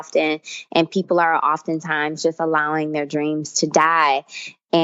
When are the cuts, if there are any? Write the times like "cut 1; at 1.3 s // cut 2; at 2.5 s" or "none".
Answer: none